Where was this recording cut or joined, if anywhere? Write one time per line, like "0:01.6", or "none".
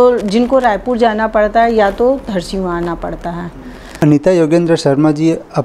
0:04.0